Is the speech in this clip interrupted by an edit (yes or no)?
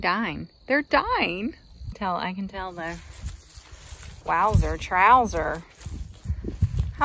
no